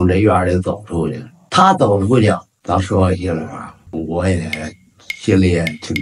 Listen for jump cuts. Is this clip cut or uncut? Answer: uncut